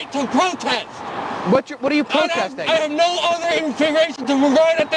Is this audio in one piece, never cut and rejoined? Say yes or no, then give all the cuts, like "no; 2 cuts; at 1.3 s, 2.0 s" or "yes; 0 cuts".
yes; 0 cuts